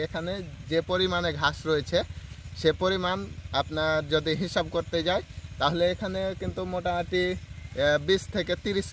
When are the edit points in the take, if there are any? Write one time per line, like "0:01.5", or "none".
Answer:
none